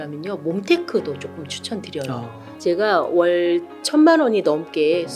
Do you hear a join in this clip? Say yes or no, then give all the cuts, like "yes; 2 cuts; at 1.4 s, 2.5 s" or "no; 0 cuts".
yes; 1 cut; at 2.4 s